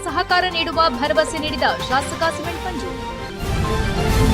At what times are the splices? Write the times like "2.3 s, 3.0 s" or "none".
3.4 s